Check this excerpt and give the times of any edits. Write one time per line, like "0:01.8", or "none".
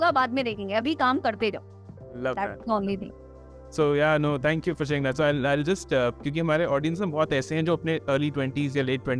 none